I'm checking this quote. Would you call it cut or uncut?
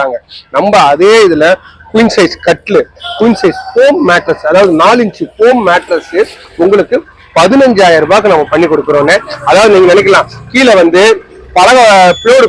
uncut